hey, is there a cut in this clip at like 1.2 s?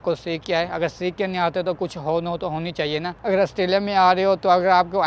no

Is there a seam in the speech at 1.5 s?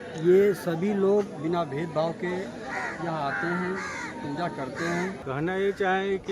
no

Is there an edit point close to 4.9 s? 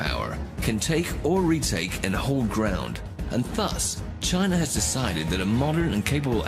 yes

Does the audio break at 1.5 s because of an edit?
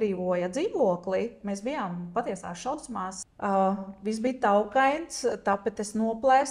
no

